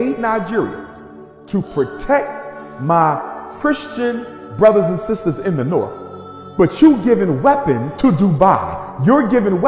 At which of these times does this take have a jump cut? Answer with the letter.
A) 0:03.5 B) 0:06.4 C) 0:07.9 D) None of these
C